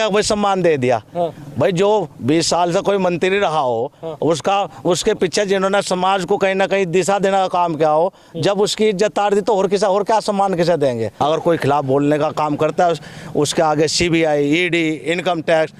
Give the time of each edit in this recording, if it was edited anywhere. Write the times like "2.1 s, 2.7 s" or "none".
11.1 s